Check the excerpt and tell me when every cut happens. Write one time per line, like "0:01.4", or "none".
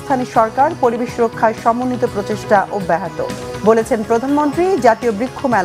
none